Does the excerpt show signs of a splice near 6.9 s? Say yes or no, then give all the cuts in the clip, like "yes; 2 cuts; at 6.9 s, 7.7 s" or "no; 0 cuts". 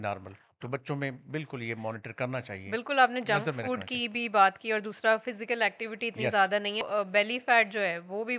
yes; 1 cut; at 6.9 s